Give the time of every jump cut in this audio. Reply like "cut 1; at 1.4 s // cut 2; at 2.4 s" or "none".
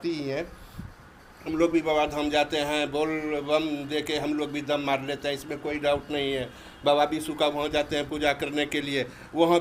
none